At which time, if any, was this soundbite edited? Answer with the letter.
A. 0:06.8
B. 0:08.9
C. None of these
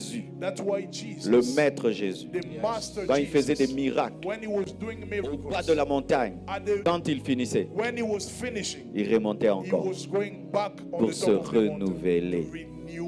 A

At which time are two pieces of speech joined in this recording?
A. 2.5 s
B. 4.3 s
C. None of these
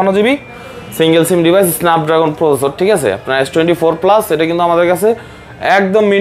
C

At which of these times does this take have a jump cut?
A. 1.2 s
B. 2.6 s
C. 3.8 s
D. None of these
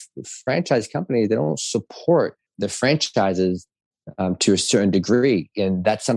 B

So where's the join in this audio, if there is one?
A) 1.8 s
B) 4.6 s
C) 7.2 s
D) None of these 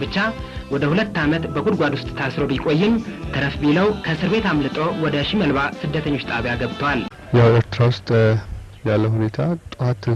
C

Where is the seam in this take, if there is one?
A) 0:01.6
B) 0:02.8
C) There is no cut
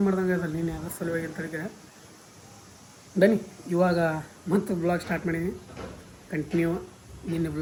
C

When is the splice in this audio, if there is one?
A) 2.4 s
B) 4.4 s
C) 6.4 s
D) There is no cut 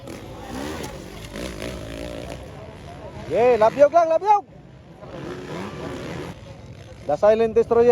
C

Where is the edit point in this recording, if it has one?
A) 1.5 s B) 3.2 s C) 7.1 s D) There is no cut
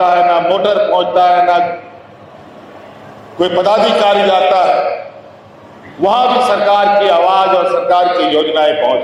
D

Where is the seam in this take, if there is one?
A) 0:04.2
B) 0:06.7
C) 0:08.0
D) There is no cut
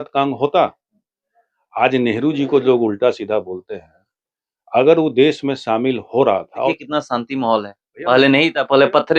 B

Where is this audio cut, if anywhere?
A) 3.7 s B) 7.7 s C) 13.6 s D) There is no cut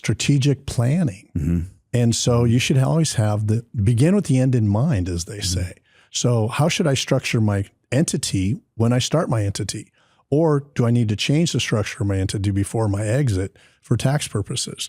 B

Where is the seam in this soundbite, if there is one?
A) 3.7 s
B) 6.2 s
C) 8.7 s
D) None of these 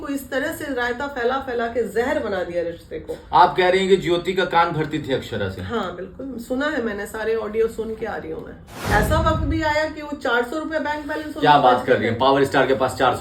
C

